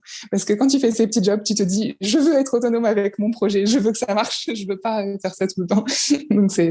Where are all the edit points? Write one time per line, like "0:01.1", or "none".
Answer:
none